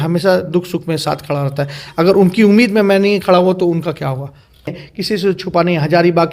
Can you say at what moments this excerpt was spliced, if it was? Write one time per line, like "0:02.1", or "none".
0:04.9